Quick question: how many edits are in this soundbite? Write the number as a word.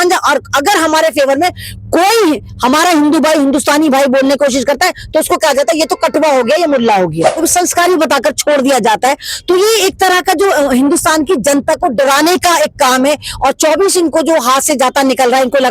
one